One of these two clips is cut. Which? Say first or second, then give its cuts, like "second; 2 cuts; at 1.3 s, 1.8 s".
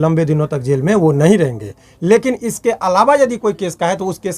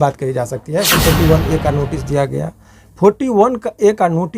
second; 1 cut; at 0.9 s